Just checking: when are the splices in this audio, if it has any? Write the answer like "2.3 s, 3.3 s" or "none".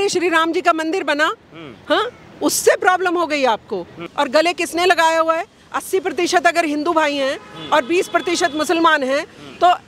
4.0 s